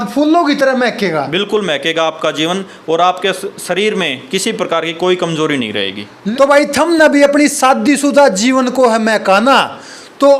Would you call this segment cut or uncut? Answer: cut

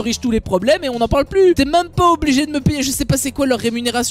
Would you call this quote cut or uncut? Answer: cut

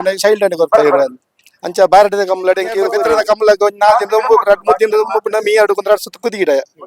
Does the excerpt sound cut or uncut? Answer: cut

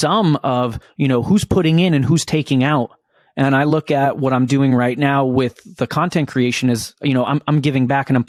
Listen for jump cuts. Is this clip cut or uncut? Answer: uncut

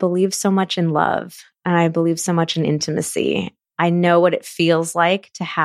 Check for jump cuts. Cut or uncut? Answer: uncut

